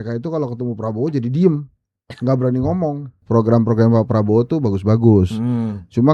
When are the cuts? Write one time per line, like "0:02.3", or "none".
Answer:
0:03.2